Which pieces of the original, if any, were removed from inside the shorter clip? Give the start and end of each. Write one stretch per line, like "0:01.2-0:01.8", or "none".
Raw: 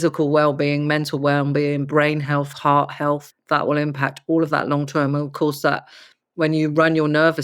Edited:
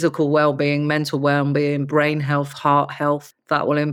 none